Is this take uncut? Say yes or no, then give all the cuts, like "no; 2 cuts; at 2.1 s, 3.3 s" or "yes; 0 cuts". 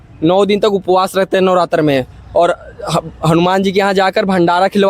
yes; 0 cuts